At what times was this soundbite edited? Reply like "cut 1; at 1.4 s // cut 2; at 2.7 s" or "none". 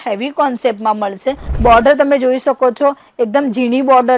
cut 1; at 1.5 s

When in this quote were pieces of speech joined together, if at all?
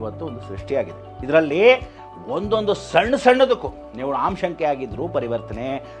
cut 1; at 1.1 s

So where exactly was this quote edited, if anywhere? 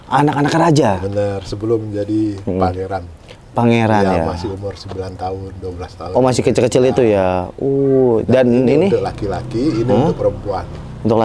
none

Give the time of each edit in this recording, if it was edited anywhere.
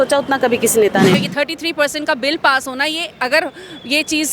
cut 1; at 1.1 s

